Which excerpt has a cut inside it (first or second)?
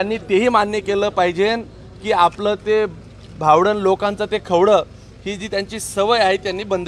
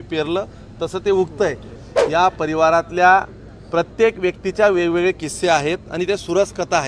second